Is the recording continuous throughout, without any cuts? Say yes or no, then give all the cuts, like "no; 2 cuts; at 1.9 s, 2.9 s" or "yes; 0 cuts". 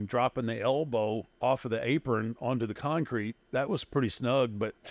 no; 2 cuts; at 1.3 s, 3.4 s